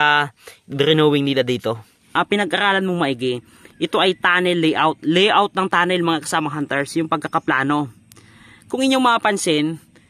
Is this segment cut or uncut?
cut